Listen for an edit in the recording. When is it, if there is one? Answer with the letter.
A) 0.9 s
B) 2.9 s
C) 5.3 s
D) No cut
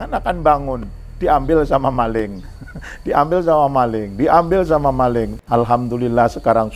C